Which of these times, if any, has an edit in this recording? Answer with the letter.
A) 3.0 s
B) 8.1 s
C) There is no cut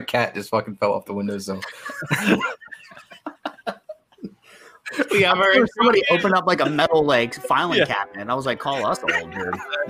C